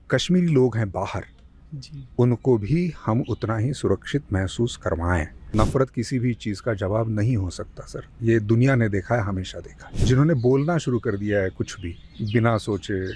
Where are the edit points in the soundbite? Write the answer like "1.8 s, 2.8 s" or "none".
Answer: 5.5 s, 9.9 s